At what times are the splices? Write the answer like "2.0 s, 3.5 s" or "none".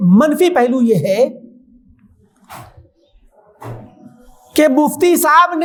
none